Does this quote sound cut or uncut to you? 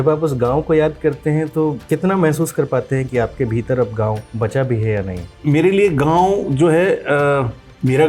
cut